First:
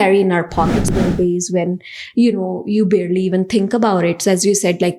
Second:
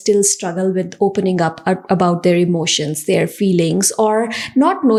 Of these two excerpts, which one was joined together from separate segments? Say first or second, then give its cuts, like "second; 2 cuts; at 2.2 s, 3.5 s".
first; 1 cut; at 1.0 s